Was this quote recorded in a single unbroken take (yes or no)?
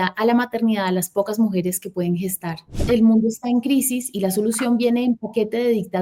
no